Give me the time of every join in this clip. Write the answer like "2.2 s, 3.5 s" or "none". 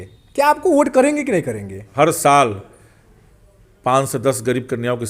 1.9 s